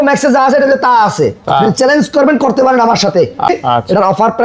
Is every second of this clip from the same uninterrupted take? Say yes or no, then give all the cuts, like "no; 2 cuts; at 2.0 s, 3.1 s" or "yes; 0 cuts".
no; 1 cut; at 3.5 s